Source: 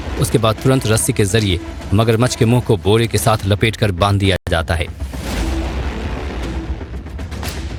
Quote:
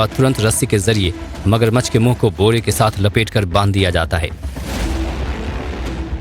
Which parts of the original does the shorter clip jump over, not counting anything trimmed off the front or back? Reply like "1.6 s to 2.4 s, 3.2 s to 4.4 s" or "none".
4.4 s to 4.5 s